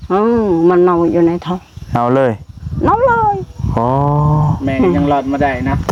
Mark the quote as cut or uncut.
uncut